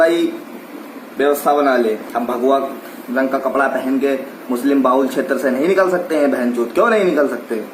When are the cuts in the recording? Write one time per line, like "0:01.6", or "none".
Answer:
0:02.0